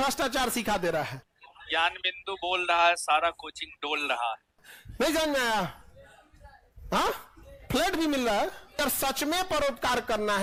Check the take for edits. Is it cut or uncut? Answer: uncut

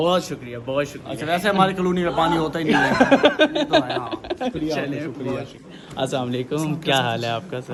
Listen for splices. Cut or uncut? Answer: uncut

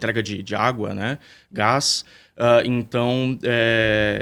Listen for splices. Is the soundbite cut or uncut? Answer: uncut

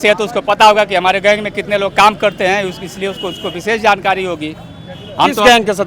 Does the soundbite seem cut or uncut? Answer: uncut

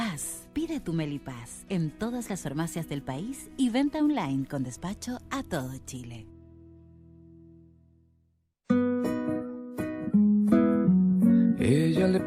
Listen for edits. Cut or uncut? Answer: cut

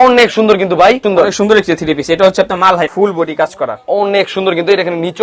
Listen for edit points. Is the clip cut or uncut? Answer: cut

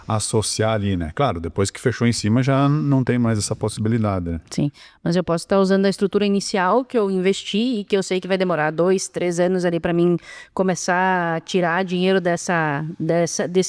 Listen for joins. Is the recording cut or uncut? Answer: uncut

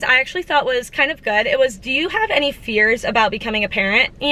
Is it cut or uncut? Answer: uncut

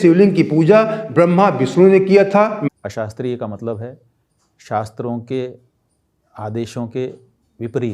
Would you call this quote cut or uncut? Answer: cut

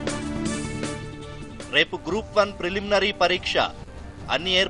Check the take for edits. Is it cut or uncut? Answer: cut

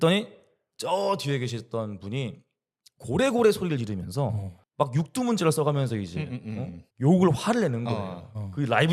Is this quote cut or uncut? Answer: uncut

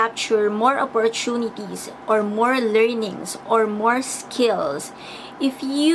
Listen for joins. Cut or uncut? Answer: uncut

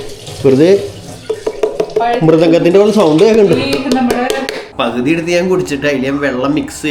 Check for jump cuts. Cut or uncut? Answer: cut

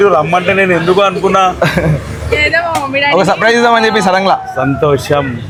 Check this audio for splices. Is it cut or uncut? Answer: uncut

